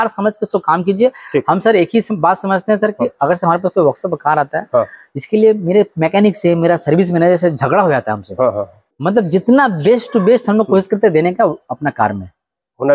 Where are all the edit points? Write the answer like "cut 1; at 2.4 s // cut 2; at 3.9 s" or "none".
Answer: none